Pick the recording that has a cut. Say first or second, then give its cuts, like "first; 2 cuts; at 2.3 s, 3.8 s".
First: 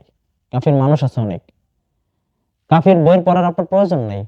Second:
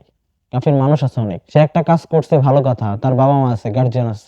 second; 1 cut; at 1.4 s